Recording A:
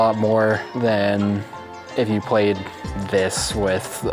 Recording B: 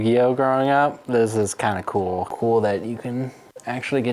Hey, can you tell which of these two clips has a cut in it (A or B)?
B